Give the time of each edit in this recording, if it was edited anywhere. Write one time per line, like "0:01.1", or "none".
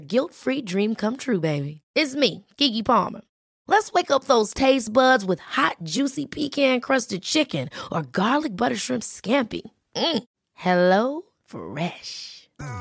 none